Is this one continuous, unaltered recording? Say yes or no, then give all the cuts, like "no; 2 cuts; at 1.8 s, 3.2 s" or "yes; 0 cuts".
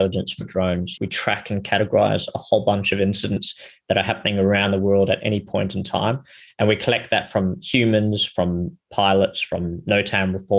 no; 1 cut; at 0.9 s